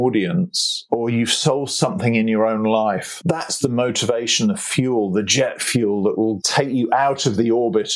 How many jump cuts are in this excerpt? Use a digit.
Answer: 3